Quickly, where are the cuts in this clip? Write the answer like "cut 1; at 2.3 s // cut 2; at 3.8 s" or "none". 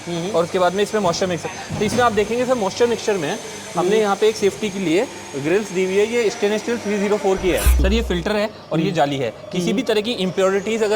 cut 1; at 7.7 s